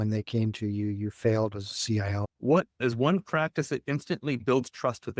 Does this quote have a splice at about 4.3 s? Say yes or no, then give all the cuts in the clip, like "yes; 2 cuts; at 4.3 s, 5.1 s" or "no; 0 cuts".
no; 1 cut; at 2.6 s